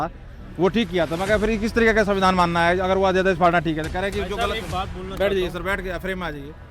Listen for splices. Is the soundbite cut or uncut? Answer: uncut